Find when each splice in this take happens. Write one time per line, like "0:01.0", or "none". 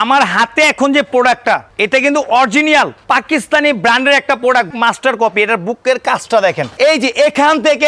0:01.7
0:03.0
0:04.7
0:06.7